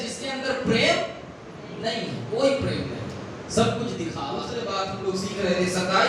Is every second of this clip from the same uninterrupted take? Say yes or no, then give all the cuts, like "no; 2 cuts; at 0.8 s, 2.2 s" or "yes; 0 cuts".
no; 1 cut; at 4.6 s